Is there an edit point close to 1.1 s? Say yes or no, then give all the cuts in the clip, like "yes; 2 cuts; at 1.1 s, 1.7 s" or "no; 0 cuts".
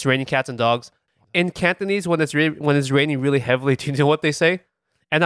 yes; 1 cut; at 1.1 s